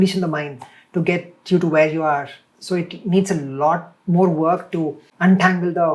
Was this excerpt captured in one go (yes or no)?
no